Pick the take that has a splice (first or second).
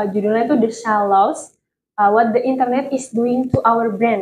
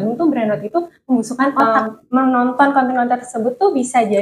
second